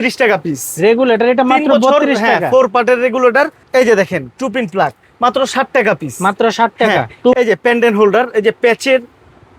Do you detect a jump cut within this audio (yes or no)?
yes